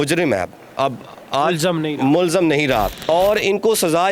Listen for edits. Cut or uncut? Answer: cut